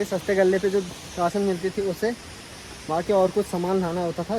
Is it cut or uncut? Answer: uncut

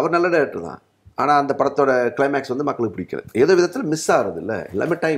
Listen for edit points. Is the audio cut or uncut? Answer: uncut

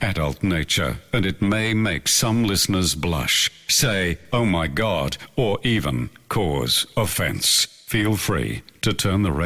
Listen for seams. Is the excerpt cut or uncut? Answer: uncut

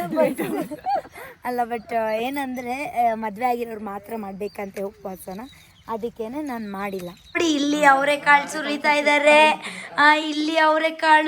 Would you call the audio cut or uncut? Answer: cut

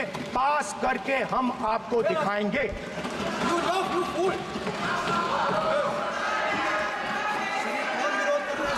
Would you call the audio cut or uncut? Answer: uncut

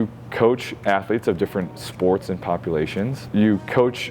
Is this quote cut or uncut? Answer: cut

